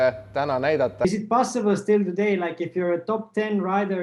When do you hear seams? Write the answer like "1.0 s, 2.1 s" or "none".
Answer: 1.0 s